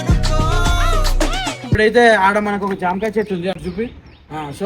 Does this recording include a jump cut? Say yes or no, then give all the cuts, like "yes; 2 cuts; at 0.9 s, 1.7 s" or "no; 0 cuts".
yes; 1 cut; at 1.8 s